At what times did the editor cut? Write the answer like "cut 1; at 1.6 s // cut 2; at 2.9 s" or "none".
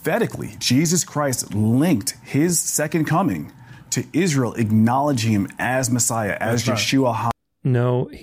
none

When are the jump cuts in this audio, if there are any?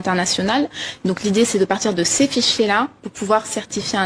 none

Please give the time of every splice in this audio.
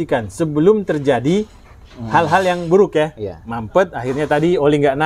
none

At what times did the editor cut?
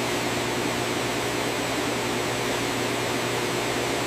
none

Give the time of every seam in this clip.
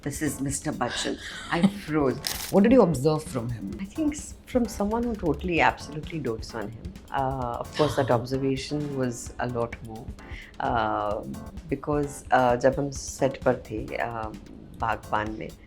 cut 1; at 2.3 s // cut 2; at 3.8 s

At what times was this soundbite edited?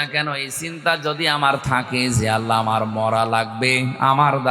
none

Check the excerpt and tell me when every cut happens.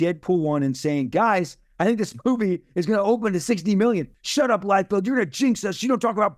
cut 1; at 4.1 s

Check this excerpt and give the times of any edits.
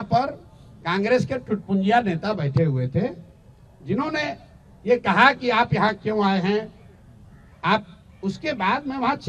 none

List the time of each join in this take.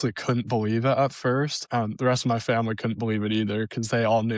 cut 1; at 1.6 s

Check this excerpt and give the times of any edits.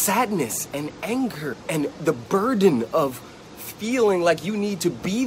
cut 1; at 1.6 s

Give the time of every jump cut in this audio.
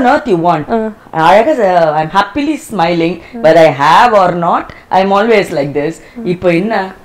none

